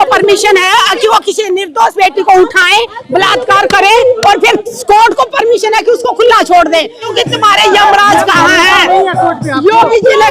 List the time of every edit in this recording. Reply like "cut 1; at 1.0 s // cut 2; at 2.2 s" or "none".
cut 1; at 7.1 s